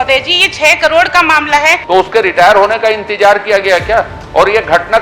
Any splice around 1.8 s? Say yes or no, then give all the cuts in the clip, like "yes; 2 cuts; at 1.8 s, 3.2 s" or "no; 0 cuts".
yes; 1 cut; at 1.8 s